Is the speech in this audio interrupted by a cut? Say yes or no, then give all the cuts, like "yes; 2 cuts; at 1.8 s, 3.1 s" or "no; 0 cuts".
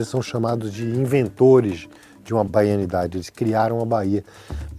yes; 1 cut; at 2.5 s